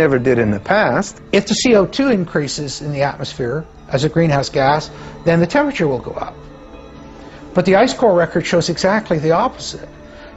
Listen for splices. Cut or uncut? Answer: cut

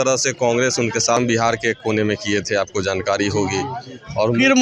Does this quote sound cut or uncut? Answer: cut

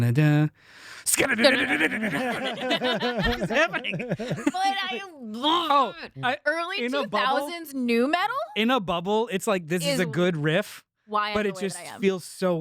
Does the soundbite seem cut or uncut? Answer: uncut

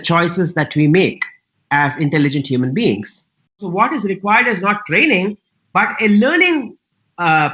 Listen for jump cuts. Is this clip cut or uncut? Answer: cut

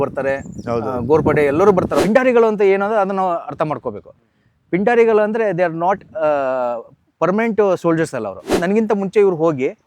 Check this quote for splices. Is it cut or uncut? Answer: cut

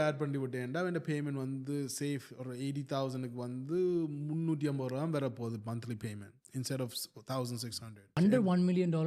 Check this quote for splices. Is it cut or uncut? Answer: cut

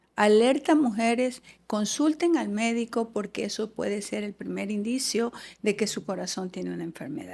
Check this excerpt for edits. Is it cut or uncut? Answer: uncut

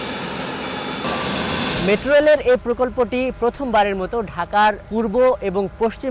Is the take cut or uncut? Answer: cut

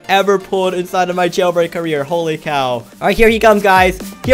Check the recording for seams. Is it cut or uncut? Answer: cut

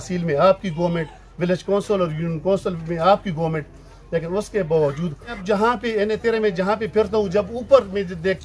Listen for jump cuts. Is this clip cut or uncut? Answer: cut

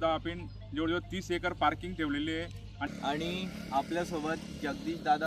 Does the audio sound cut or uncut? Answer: cut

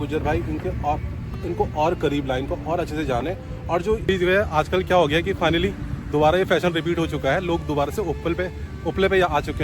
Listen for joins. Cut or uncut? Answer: cut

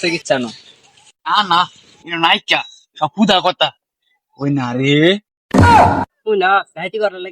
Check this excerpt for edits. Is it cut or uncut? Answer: cut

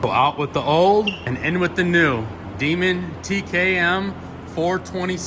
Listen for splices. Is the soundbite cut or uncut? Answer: cut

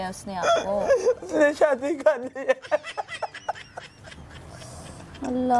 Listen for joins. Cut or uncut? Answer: uncut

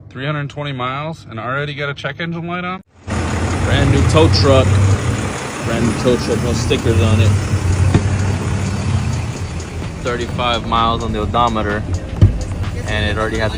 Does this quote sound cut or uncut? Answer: cut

